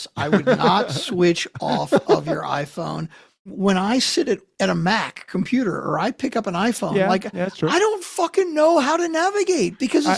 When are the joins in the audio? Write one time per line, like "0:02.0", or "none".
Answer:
0:03.5